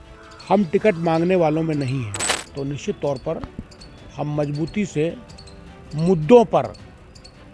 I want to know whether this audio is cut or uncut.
cut